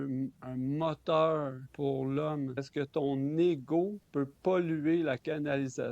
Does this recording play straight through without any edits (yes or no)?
no